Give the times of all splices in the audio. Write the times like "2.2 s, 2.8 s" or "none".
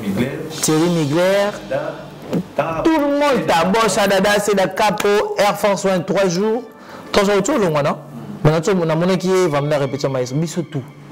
none